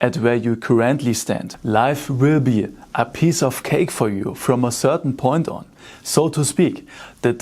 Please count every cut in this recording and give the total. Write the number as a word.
one